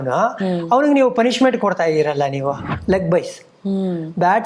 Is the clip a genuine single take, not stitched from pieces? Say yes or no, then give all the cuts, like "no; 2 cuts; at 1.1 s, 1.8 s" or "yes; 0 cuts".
no; 1 cut; at 2.7 s